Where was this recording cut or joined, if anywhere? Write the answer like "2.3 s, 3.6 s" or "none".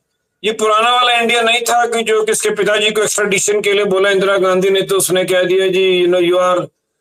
none